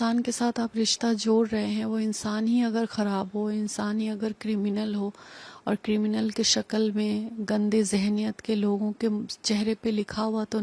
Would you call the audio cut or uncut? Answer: uncut